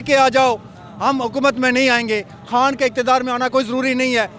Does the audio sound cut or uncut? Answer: uncut